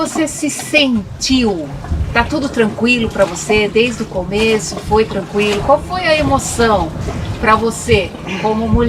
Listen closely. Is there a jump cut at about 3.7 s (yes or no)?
no